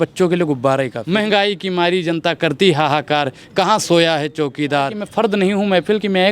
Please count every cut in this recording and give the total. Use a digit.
2